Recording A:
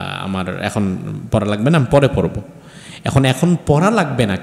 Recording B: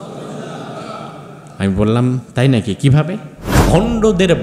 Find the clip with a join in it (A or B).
B